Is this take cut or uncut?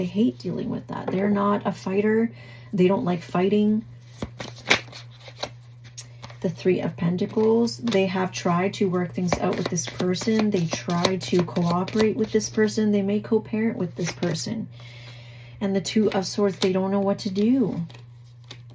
uncut